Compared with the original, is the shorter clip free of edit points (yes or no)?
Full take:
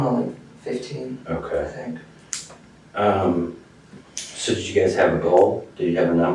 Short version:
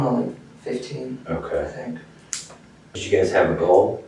no